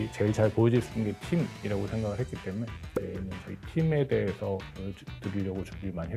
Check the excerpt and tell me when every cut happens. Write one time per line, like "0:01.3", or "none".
none